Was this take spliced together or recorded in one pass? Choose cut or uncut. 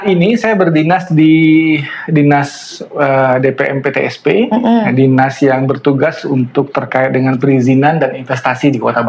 uncut